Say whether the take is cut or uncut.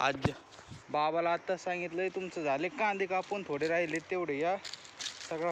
uncut